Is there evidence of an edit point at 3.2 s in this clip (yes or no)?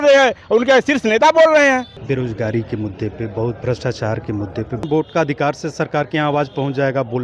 no